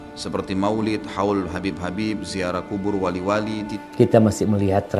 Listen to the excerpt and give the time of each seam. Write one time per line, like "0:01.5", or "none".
0:03.7